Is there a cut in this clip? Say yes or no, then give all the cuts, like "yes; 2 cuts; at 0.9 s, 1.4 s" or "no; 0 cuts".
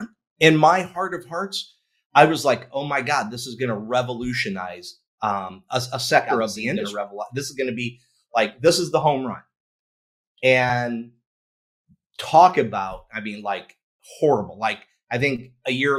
yes; 1 cut; at 6.9 s